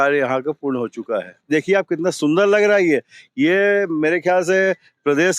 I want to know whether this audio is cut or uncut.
cut